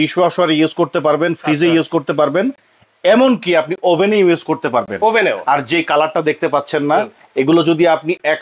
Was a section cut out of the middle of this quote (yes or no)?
no